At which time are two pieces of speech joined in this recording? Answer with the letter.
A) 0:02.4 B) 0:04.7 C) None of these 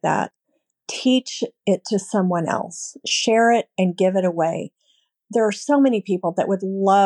C